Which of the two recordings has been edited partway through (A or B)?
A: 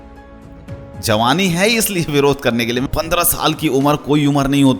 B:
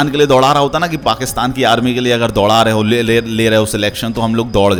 A